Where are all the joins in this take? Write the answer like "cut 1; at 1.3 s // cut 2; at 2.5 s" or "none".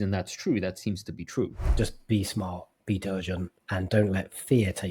cut 1; at 1.6 s // cut 2; at 3.6 s